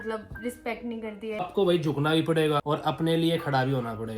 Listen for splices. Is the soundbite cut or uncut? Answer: cut